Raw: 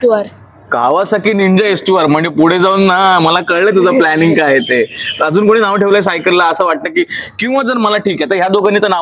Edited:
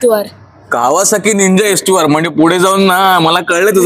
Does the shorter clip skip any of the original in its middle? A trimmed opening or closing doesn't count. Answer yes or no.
no